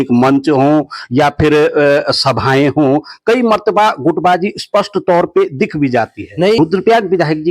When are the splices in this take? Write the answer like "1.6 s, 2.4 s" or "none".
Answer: 6.6 s

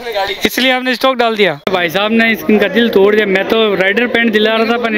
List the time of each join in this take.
1.6 s

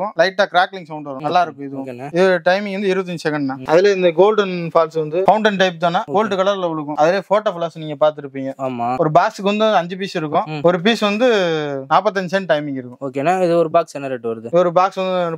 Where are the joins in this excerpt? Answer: none

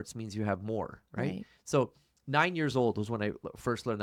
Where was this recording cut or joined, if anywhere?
none

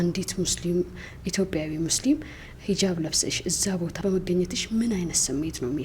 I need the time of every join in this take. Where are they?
4.0 s

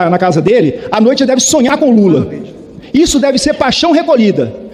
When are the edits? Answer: none

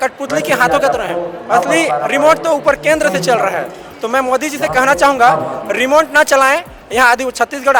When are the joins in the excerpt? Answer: none

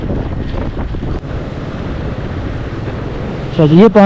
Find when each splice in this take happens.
1.2 s

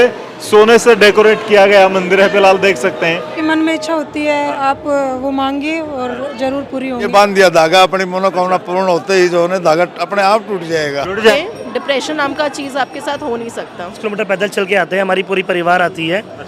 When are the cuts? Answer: 3.3 s, 7.1 s, 11.3 s, 14.0 s

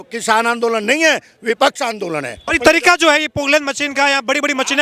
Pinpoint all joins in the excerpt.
2.4 s

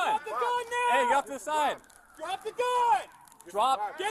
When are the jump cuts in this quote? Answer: 3.1 s

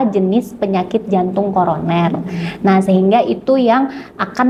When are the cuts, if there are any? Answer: none

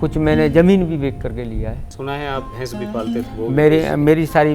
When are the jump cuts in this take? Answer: 1.9 s

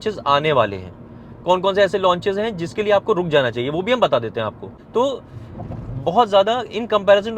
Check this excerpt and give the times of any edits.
4.6 s

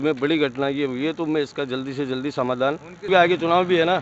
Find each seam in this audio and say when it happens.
3.1 s

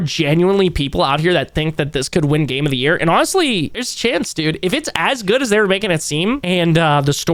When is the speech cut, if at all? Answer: none

